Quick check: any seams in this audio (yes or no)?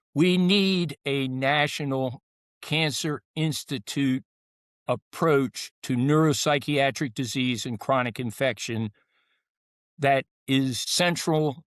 no